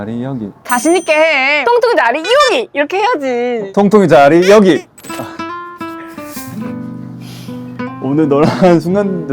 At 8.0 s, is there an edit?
yes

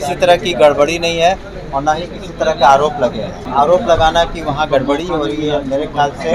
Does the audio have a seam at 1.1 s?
no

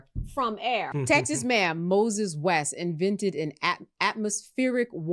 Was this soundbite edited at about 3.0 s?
no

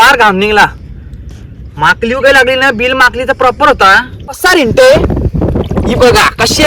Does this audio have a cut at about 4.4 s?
yes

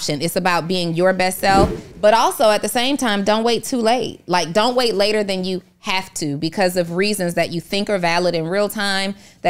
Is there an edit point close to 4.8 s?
no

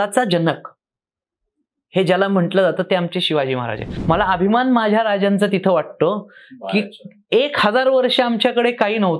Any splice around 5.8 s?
no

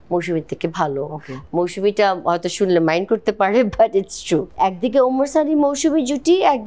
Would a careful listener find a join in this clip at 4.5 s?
yes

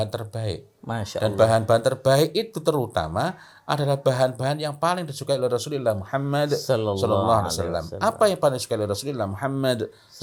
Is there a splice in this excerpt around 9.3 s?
no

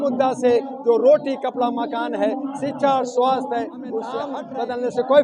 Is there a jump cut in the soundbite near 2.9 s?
no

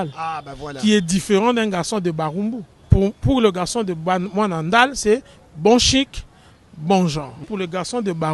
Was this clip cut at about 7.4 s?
yes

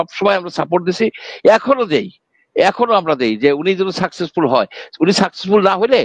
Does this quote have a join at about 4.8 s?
no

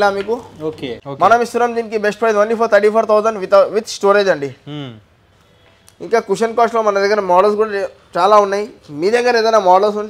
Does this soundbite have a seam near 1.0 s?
yes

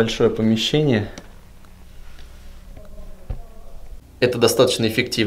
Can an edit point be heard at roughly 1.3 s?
no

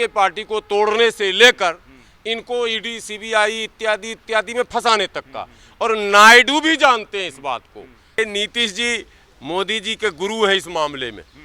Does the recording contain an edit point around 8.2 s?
yes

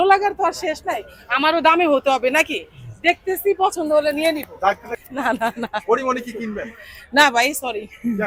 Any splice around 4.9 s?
yes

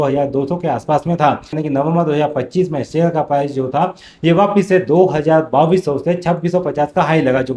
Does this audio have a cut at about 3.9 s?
no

